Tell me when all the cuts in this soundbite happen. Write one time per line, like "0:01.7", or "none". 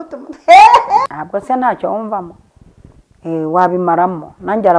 0:01.1

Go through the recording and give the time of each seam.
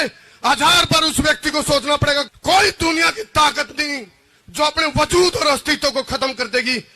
0:02.3

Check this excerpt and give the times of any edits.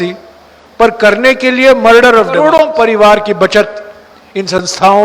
0:02.4

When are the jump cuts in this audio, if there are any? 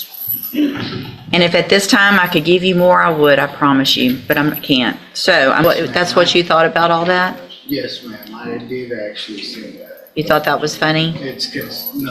0:05.6

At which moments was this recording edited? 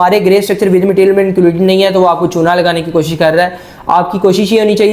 none

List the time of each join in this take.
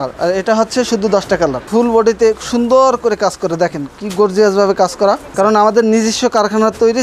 0:01.7
0:05.3

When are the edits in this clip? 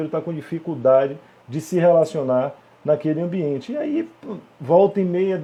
none

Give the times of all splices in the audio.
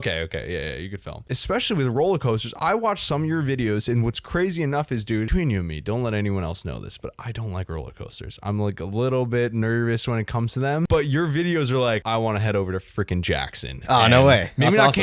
0:01.2
0:05.3
0:10.9
0:12.0

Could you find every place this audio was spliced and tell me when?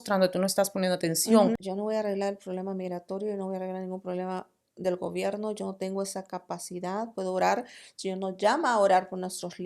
0:01.7

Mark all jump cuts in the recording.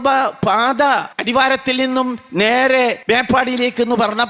0:01.2
0:03.0

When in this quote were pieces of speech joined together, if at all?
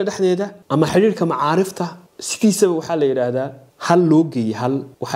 none

